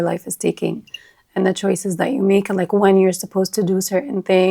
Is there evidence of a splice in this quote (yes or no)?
no